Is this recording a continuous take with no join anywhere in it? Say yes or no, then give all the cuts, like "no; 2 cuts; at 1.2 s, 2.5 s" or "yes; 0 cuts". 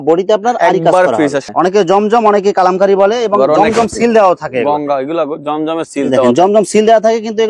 no; 1 cut; at 1.4 s